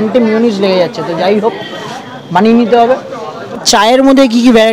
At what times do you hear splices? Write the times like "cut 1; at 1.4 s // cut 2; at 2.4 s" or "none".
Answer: cut 1; at 3.6 s